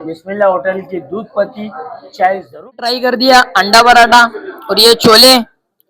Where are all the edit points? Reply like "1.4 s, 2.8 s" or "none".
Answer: 2.8 s